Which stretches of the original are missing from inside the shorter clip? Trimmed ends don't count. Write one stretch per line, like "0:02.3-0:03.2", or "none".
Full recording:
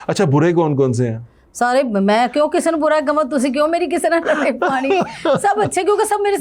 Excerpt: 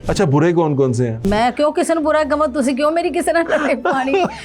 0:01.2-0:02.0